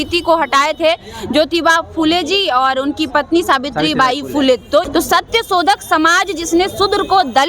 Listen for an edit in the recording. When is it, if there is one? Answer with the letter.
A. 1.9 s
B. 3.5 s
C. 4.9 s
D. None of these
C